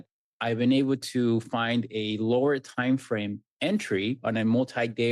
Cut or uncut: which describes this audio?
cut